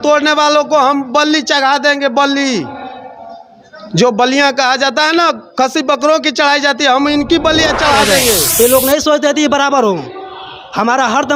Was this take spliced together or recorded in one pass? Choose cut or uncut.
cut